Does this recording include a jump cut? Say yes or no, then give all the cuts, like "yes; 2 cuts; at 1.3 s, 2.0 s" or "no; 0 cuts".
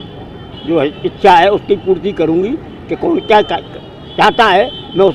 no; 0 cuts